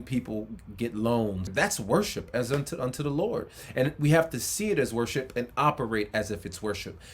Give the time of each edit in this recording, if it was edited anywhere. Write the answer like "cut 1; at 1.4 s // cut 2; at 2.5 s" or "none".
cut 1; at 1.4 s